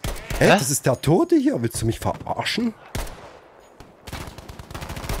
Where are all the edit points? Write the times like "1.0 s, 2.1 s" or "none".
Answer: none